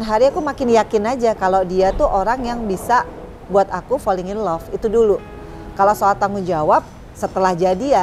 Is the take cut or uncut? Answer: uncut